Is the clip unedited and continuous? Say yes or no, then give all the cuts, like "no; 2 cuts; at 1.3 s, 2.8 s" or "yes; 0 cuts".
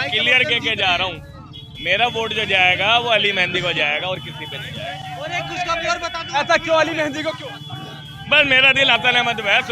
yes; 0 cuts